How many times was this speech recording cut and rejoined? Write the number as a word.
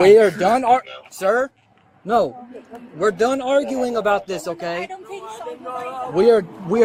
zero